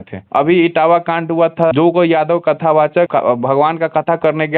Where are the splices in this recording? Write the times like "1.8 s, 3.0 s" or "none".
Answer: 1.7 s, 3.1 s